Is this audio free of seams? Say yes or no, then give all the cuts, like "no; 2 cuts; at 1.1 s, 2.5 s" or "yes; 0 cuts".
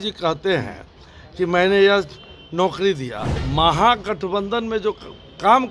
no; 1 cut; at 3.4 s